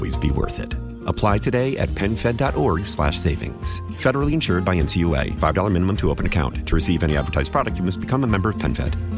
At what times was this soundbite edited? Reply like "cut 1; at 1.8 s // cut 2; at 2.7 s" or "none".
none